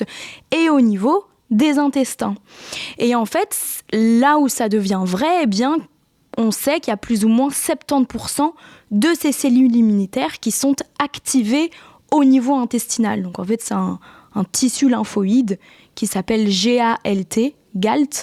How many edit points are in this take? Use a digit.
0